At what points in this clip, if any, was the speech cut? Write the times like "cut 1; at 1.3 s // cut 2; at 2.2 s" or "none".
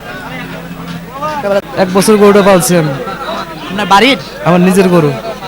cut 1; at 1.6 s

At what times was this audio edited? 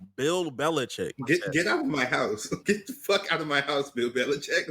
cut 1; at 1.2 s // cut 2; at 2.6 s

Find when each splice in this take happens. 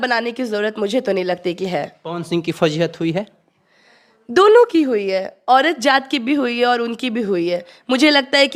none

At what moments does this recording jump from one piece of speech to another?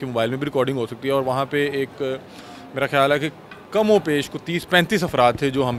none

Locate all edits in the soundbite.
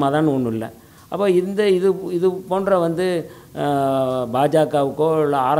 none

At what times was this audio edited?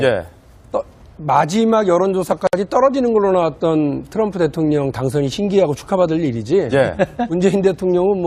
none

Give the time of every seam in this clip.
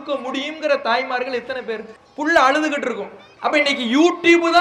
cut 1; at 2.3 s // cut 2; at 3.5 s

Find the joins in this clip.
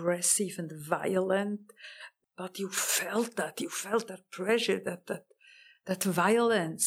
cut 1; at 2.1 s

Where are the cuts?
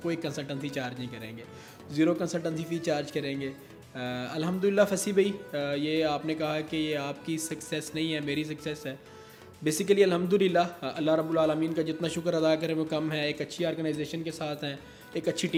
none

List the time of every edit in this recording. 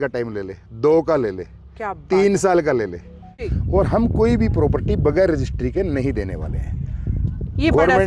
cut 1; at 3.4 s

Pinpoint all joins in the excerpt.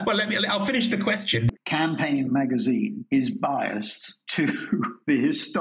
cut 1; at 1.5 s

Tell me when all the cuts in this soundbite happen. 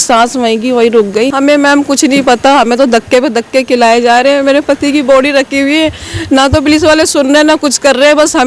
cut 1; at 1.3 s

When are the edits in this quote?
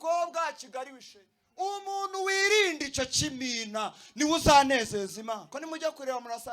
cut 1; at 5.5 s

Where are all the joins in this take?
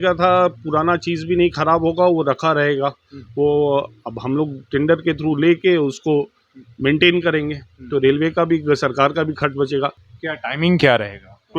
cut 1; at 10.0 s

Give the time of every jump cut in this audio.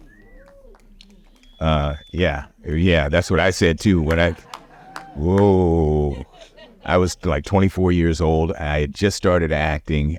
none

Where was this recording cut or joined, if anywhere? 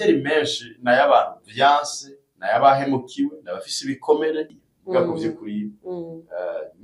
cut 1; at 4.5 s

